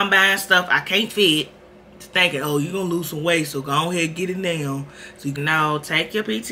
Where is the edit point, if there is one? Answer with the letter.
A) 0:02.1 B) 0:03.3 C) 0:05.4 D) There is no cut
C